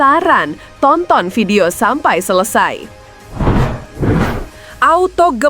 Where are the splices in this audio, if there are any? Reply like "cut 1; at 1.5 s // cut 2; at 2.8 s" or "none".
cut 1; at 3.1 s